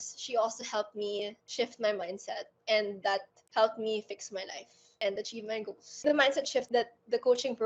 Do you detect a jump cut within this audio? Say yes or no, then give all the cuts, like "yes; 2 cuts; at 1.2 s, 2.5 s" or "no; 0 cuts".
yes; 1 cut; at 6.0 s